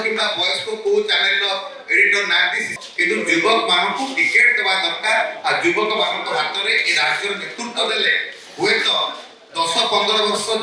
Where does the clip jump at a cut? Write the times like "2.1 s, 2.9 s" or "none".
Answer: 2.8 s